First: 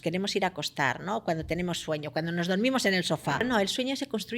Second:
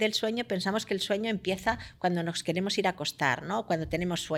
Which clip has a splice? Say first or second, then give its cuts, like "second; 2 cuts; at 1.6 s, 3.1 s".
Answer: first; 1 cut; at 3.5 s